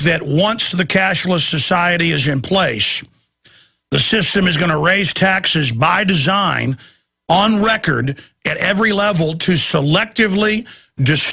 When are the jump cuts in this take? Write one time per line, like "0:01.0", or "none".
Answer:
0:06.5